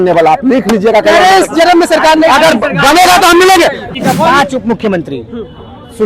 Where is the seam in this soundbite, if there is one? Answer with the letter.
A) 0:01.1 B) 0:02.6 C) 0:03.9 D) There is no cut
C